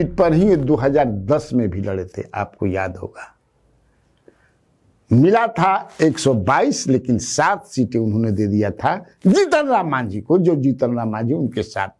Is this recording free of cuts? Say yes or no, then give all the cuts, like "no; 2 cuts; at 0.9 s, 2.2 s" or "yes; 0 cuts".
yes; 0 cuts